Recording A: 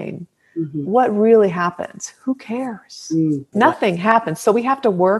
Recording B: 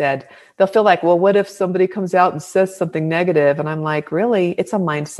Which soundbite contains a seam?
A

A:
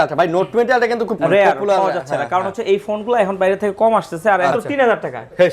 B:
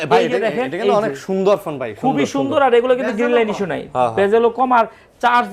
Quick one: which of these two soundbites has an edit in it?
A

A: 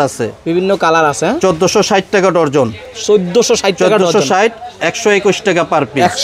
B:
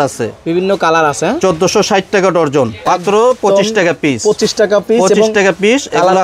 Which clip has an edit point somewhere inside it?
B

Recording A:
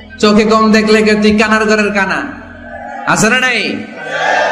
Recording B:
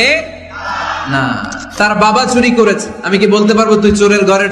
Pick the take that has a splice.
B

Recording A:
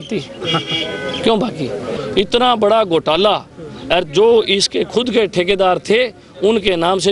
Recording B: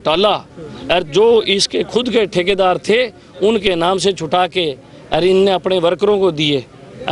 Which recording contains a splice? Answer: A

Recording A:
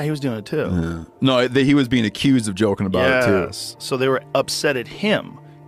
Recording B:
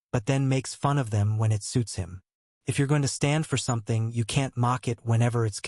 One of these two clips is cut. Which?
B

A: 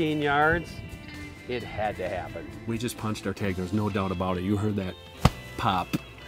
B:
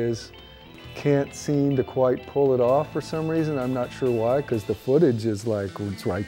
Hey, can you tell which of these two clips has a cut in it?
A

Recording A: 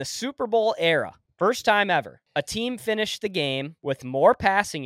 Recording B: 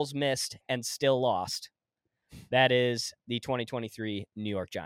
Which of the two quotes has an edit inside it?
A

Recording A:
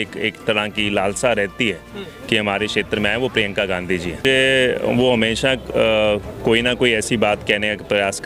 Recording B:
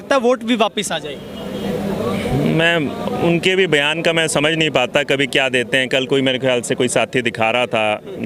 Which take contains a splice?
A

